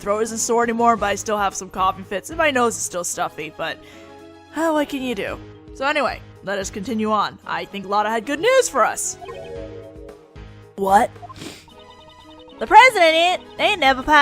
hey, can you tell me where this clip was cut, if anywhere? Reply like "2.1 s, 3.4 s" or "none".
12.9 s